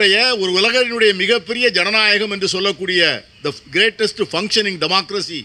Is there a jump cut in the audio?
no; 0 cuts

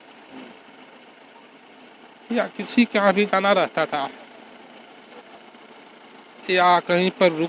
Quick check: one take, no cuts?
yes; 0 cuts

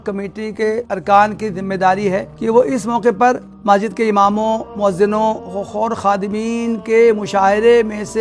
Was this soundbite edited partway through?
yes; 5 cuts; at 0.9 s, 2.3 s, 3.5 s, 4.7 s, 5.5 s

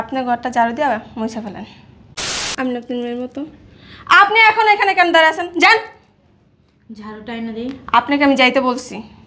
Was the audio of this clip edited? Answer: yes; 1 cut; at 2.3 s

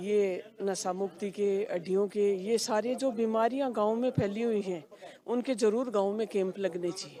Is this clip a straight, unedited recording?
yes; 0 cuts

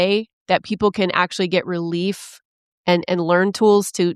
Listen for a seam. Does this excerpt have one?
no; 0 cuts

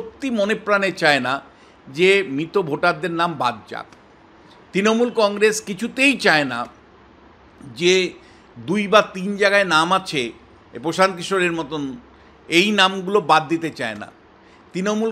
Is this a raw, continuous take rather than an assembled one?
yes; 0 cuts

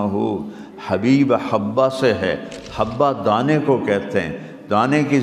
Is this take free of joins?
yes; 0 cuts

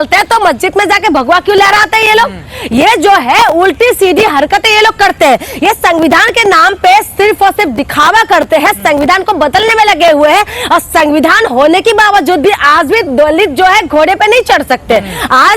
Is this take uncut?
yes; 0 cuts

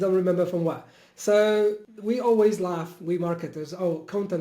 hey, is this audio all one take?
no; 1 cut; at 1.9 s

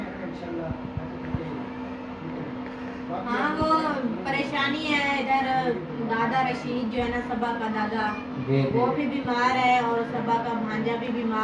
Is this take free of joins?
no; 1 cut; at 5.9 s

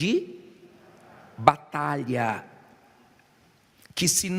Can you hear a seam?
yes; 1 cut; at 2.0 s

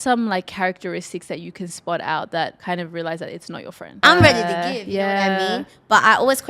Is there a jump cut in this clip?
yes; 2 cuts; at 2.6 s, 4.0 s

